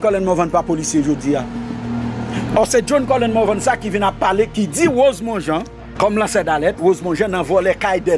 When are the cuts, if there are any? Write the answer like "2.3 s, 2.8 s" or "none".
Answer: 5.8 s